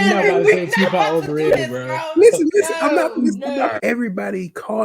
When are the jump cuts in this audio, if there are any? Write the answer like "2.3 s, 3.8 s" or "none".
3.8 s